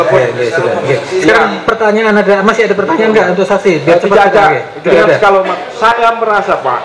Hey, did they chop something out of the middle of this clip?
no; 0 cuts

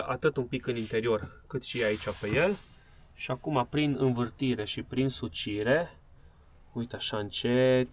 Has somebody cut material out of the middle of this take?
no; 0 cuts

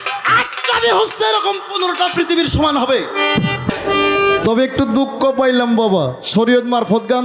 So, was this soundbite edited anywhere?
yes; 1 cut; at 3.7 s

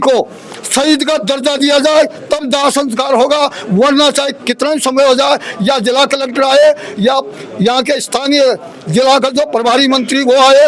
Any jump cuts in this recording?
no; 0 cuts

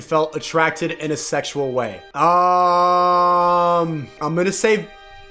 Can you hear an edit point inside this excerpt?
yes; 2 cuts; at 2.0 s, 4.1 s

